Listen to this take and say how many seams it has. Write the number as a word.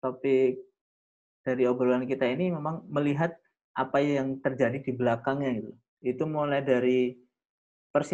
one